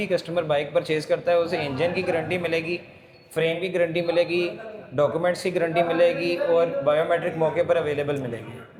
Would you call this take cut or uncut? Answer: uncut